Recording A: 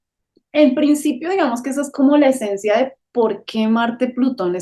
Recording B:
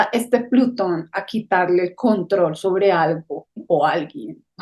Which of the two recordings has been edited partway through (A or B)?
B